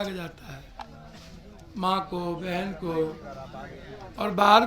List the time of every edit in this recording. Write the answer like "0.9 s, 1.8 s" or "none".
none